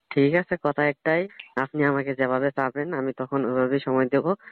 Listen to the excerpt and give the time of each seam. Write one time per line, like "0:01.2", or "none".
0:01.4